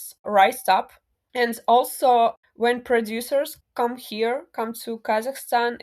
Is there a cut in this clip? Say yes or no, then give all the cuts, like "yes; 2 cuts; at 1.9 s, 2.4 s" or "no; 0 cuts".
yes; 3 cuts; at 1.2 s, 2.5 s, 3.6 s